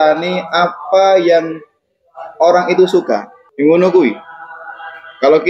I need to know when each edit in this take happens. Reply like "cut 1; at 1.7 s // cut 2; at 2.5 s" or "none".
cut 1; at 3.4 s